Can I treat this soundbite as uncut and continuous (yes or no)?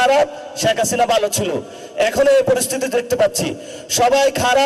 yes